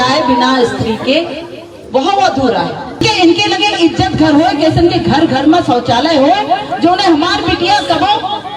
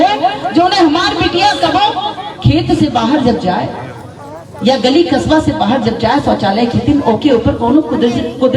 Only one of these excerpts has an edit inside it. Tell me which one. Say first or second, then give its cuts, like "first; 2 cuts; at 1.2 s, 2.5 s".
first; 1 cut; at 3.0 s